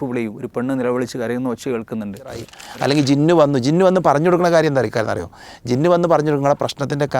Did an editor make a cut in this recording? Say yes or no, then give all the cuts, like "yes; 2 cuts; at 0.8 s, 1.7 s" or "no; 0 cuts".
yes; 1 cut; at 2.6 s